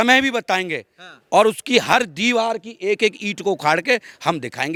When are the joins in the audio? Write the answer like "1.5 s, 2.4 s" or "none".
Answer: none